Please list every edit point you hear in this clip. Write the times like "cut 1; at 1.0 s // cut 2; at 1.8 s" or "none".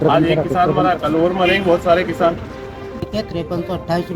cut 1; at 3.1 s